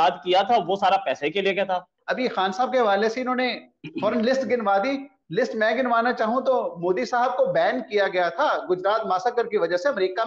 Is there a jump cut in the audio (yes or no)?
yes